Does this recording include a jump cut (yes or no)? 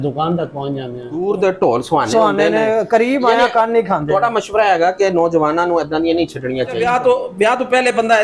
yes